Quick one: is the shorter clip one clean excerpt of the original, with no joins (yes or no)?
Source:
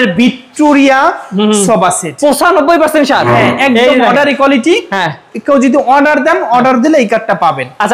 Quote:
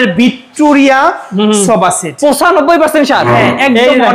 yes